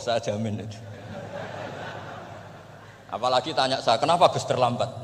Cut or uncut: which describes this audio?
uncut